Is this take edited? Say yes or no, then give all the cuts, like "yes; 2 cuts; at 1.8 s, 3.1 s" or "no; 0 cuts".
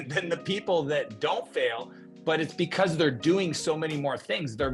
no; 0 cuts